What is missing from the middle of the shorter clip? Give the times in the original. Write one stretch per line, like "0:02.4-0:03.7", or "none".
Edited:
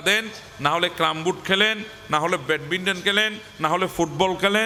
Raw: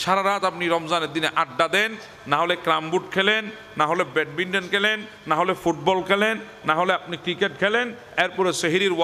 none

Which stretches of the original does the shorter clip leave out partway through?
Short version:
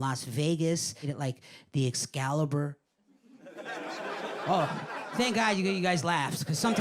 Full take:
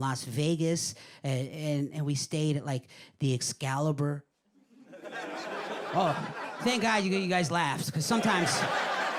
0:01.1-0:02.6

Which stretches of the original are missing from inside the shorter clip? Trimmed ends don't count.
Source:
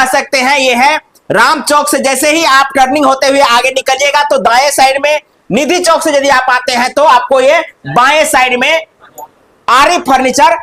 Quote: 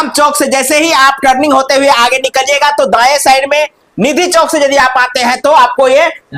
none

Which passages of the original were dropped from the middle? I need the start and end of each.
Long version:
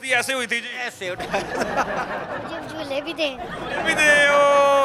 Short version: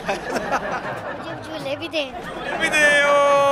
none

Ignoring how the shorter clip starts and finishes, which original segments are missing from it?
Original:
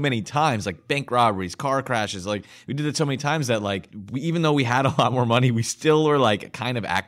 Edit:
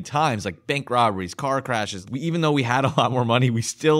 0:02.2-0:04.0

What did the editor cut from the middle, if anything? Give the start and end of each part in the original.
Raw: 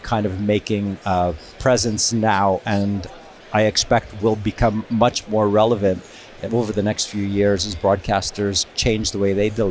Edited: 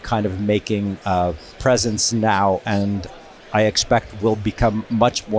none

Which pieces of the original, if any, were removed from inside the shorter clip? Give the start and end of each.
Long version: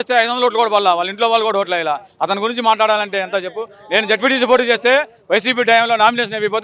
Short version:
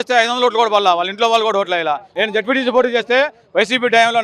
0:02.1-0:03.8

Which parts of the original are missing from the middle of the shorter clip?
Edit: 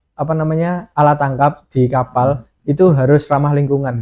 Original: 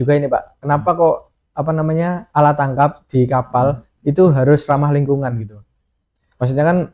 none

